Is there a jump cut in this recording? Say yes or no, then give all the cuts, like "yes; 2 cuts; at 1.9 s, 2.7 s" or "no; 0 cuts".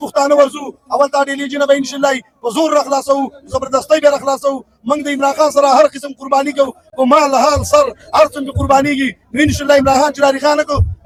no; 0 cuts